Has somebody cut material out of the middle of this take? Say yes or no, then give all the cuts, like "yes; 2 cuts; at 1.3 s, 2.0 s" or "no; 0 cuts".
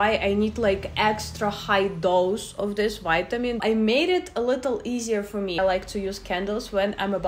yes; 2 cuts; at 3.6 s, 5.6 s